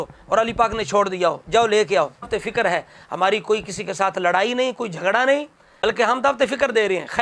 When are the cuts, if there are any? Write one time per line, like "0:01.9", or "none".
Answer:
0:02.3